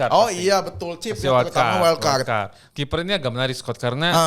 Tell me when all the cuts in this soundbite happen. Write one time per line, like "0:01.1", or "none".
0:02.6